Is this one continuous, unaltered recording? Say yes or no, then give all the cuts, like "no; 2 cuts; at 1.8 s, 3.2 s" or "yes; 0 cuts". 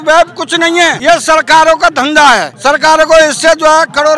no; 2 cuts; at 1.0 s, 2.5 s